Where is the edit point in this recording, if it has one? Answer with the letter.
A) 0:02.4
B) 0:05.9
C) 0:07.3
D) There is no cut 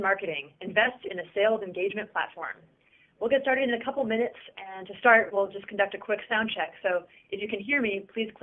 D